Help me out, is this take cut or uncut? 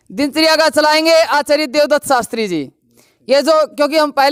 uncut